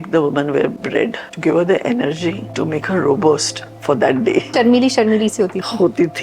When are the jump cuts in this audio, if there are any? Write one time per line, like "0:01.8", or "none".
0:00.9
0:02.5
0:04.5